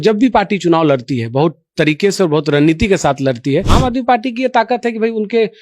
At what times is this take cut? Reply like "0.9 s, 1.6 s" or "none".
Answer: 3.7 s